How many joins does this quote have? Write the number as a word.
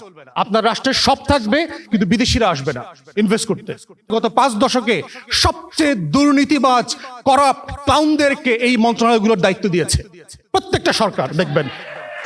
one